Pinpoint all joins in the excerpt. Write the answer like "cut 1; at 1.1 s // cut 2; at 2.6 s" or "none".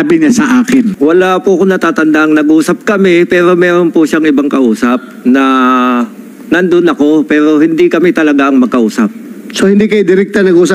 cut 1; at 0.9 s